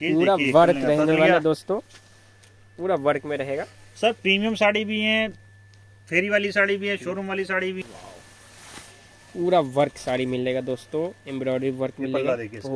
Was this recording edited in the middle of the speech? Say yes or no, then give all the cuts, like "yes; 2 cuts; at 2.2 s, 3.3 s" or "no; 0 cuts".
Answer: yes; 1 cut; at 7.8 s